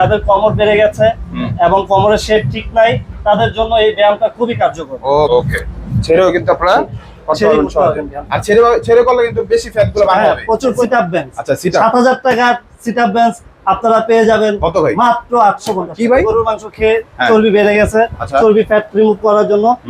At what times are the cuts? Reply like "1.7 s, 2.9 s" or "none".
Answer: 5.3 s, 10.8 s, 16.2 s